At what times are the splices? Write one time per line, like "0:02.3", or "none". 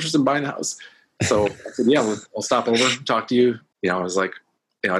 0:03.7

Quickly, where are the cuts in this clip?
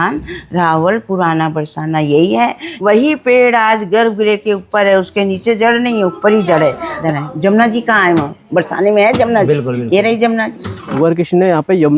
0:02.7
0:07.0
0:11.0

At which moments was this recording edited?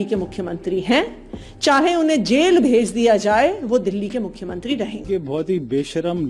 0:05.0

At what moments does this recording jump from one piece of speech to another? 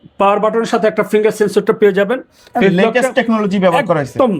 none

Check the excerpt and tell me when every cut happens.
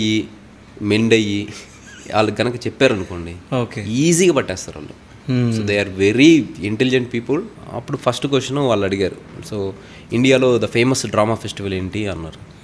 0:07.5

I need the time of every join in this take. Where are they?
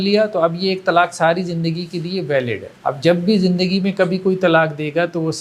0:02.7

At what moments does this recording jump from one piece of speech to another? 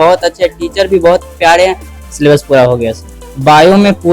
0:01.9
0:03.1

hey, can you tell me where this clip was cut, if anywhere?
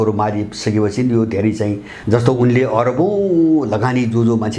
0:01.9

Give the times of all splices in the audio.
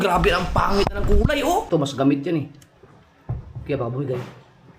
0:01.7

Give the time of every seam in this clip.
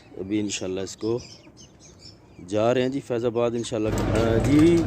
0:03.9

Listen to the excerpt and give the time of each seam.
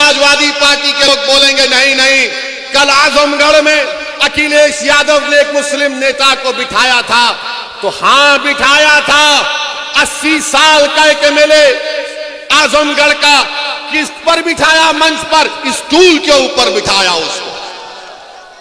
0:01.1

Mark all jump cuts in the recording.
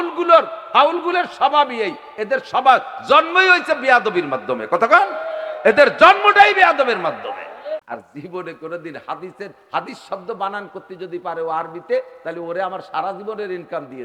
0:07.9

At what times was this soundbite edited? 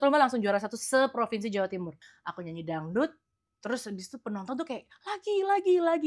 0:01.9

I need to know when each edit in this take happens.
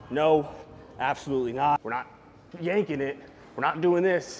0:01.8

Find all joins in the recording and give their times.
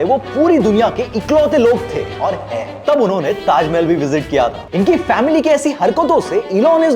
0:02.8

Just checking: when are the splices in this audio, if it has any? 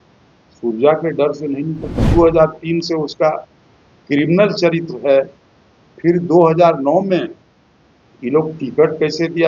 0:02.0

